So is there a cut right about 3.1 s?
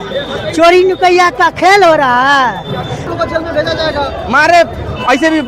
yes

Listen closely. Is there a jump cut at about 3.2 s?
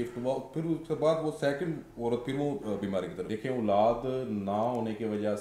yes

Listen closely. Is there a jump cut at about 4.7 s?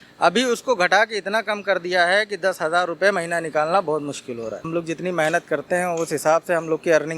yes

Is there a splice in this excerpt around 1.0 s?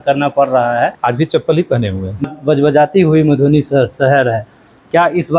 yes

